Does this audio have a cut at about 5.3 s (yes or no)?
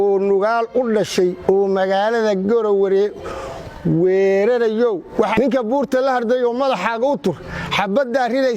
yes